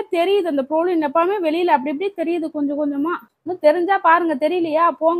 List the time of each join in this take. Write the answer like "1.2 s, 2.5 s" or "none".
3.3 s